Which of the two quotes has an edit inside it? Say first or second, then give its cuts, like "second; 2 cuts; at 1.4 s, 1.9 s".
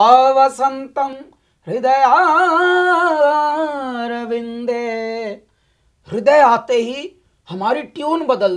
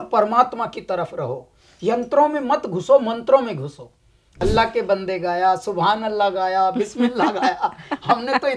second; 1 cut; at 4.2 s